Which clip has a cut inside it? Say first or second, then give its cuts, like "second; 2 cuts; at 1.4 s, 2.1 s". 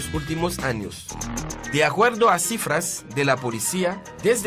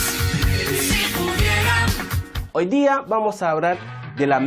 second; 1 cut; at 1.2 s